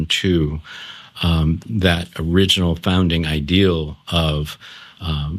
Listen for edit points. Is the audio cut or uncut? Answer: uncut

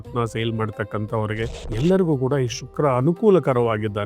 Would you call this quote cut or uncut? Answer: cut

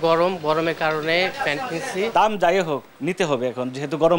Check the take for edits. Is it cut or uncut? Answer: cut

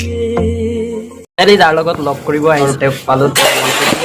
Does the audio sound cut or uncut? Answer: cut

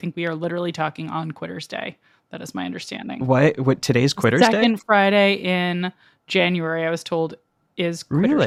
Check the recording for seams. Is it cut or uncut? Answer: uncut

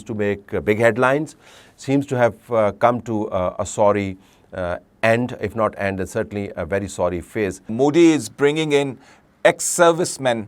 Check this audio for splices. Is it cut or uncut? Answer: cut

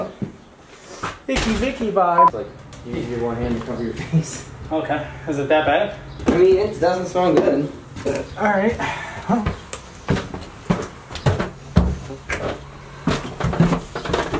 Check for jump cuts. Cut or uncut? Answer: cut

